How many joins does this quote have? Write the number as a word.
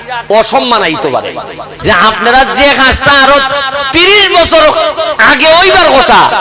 one